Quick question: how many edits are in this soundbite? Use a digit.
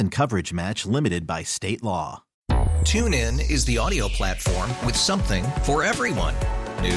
1